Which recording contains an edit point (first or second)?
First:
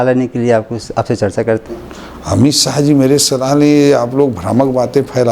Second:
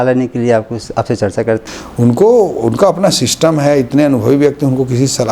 second